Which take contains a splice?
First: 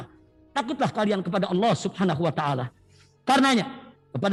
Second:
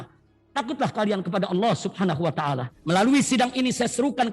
second; 1 cut; at 2.7 s

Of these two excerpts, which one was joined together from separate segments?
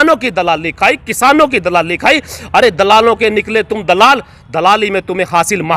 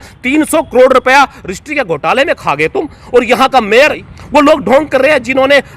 second; 1 cut; at 4.1 s

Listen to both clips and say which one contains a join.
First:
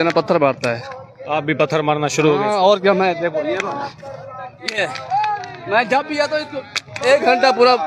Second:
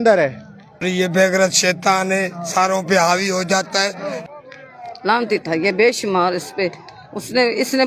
second; 2 cuts; at 0.8 s, 4.2 s

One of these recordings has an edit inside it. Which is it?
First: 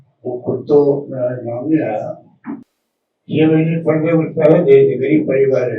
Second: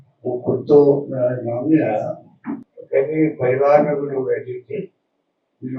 first; 1 cut; at 2.7 s

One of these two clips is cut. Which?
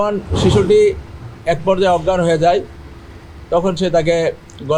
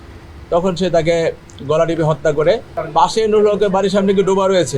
second; 1 cut; at 2.8 s

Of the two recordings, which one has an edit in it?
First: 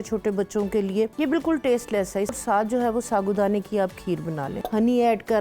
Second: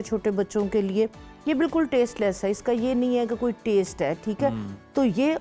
first; 3 cuts; at 1.1 s, 2.3 s, 4.5 s

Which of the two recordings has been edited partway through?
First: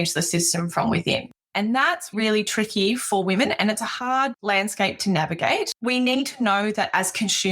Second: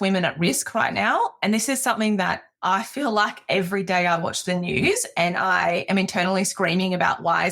first; 3 cuts; at 1.4 s, 4.4 s, 5.7 s

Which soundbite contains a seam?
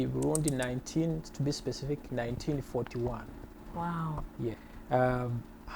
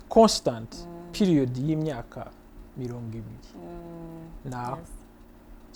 first; 1 cut; at 4.7 s

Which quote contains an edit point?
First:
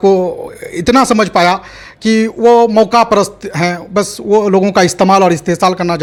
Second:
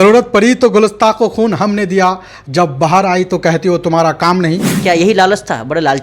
second; 1 cut; at 4.8 s

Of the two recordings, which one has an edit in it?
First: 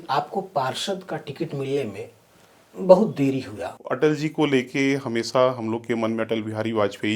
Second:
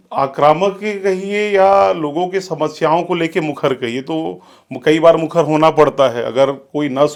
first; 1 cut; at 3.7 s

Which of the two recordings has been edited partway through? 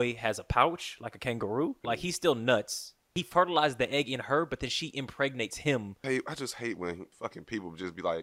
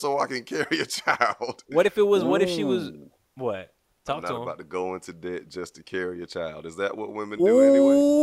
first; 4 cuts; at 1.8 s, 3.2 s, 6.0 s, 7.1 s

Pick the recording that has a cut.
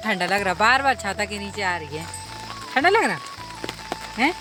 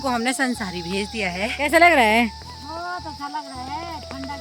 second; 1 cut; at 1.7 s

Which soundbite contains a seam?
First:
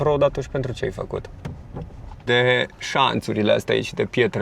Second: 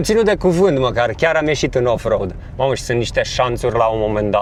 first; 1 cut; at 2.1 s

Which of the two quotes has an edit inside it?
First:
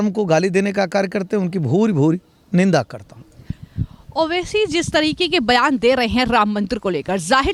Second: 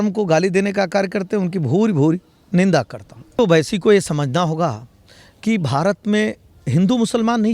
second; 1 cut; at 3.4 s

